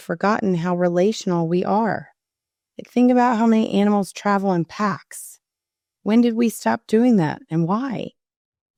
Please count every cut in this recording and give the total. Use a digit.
0